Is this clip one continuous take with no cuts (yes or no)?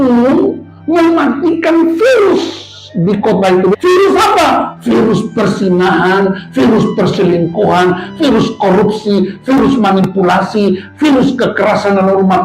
no